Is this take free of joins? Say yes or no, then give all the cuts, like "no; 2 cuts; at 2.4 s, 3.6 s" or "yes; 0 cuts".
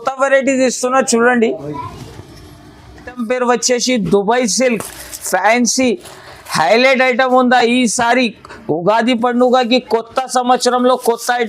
no; 1 cut; at 3.1 s